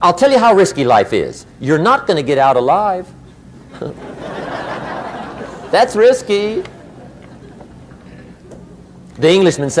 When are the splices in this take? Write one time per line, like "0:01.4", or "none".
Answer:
none